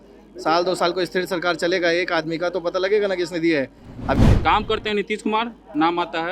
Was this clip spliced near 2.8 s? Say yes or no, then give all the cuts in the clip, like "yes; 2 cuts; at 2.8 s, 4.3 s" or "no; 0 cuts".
no; 1 cut; at 4.2 s